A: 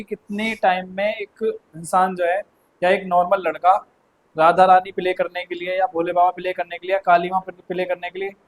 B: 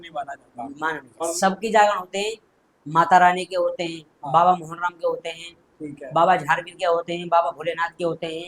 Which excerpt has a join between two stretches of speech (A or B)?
B